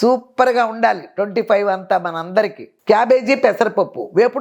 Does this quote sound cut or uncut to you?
cut